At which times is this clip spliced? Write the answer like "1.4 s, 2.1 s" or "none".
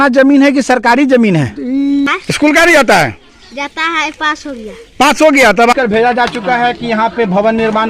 2.1 s, 5.7 s